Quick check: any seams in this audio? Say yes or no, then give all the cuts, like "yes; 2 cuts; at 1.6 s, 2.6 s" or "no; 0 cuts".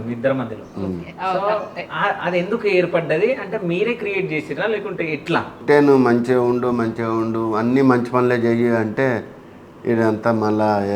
yes; 1 cut; at 5.6 s